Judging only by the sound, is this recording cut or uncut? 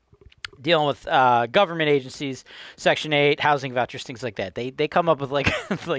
uncut